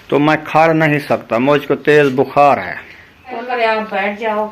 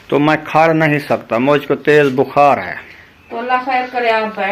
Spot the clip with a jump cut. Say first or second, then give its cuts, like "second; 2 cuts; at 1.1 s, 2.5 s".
first; 1 cut; at 3.4 s